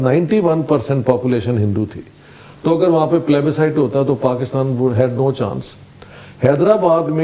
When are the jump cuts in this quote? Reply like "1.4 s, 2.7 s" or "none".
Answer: none